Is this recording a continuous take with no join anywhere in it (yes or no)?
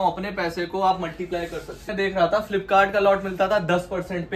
no